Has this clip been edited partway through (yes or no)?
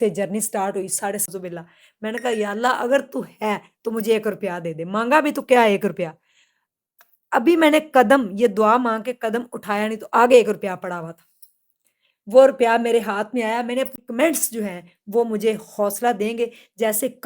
yes